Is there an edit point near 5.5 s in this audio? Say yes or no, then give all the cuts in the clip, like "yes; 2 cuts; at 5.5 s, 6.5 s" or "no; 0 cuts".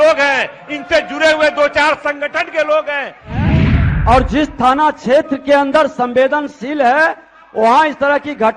no; 1 cut; at 3.5 s